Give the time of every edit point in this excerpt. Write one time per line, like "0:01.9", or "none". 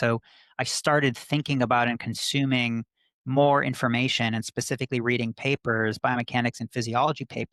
none